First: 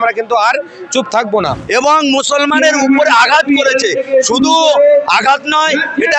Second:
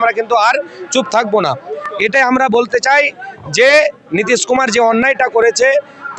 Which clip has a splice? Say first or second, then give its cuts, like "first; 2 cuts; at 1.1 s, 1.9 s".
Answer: first; 1 cut; at 1.6 s